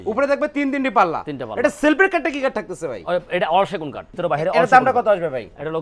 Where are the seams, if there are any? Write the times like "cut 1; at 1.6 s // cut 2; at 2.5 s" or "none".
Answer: cut 1; at 4.1 s